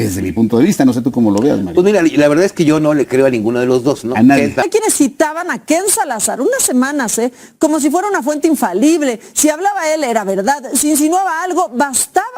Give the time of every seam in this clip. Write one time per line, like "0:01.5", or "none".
0:04.7